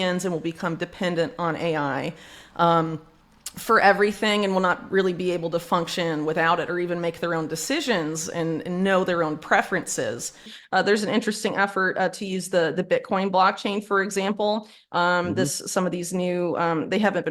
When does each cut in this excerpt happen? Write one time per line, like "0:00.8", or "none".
0:10.5